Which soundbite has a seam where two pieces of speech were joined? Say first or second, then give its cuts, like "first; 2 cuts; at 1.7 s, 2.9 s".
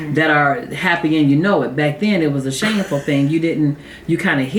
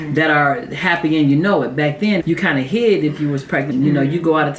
second; 2 cuts; at 2.2 s, 3.7 s